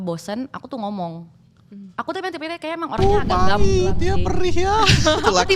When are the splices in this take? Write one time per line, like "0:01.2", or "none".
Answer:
none